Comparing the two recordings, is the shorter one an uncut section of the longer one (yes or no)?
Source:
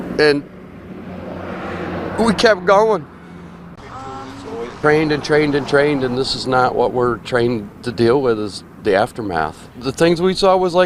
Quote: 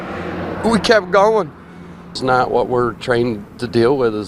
no